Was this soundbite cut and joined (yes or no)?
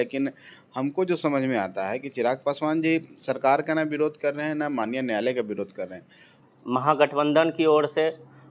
yes